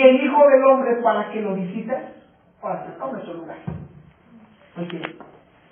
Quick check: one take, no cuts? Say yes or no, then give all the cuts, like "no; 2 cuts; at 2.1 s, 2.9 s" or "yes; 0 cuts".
no; 1 cut; at 1.4 s